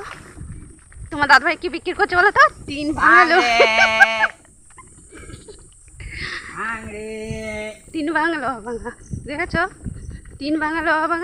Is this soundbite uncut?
yes; 0 cuts

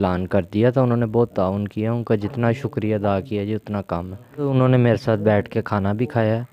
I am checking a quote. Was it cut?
yes; 1 cut; at 4.5 s

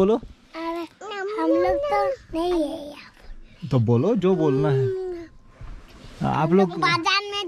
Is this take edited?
no; 0 cuts

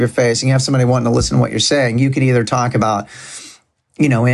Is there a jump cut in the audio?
no; 0 cuts

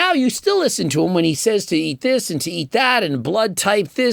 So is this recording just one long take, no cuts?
yes; 0 cuts

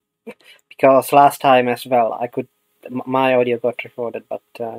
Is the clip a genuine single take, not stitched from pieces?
no; 1 cut; at 3.8 s

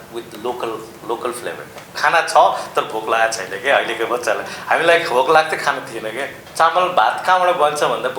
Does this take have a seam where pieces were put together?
yes; 2 cuts; at 1.9 s, 6.4 s

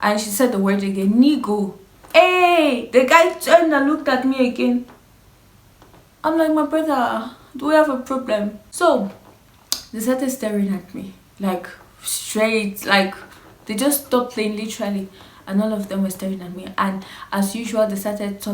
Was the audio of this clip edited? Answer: yes; 1 cut; at 8.6 s

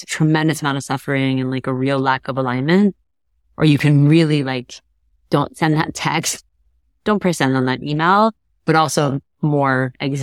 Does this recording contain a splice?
no; 0 cuts

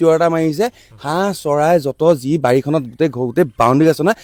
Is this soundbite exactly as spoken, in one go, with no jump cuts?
yes; 0 cuts

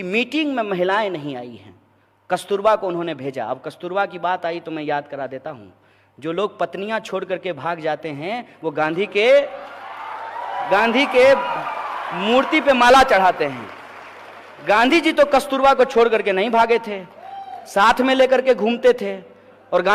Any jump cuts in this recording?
no; 0 cuts

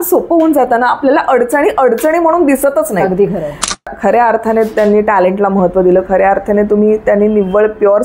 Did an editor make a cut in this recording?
yes; 1 cut; at 3.9 s

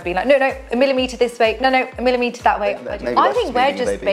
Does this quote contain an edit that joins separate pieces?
yes; 1 cut; at 2.9 s

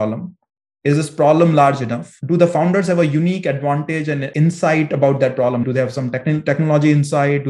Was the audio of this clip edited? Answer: yes; 1 cut; at 4.3 s

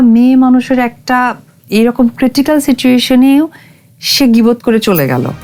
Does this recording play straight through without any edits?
yes; 0 cuts

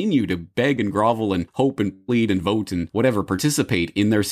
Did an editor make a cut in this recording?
yes; 1 cut; at 1.5 s

